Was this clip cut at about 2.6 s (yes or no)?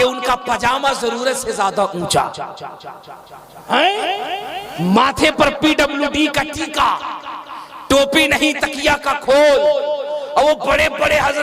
no